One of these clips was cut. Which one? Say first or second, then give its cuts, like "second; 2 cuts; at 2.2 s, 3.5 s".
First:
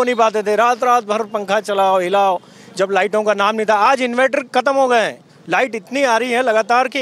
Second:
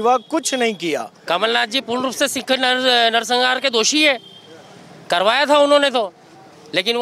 second; 1 cut; at 1.1 s